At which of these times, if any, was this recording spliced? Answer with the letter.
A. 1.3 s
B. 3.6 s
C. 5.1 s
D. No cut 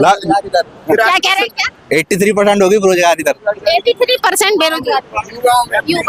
D